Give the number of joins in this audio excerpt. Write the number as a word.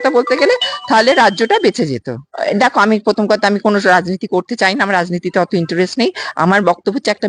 zero